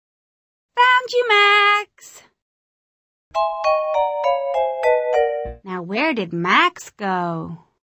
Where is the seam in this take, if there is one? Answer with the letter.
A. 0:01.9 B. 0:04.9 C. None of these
C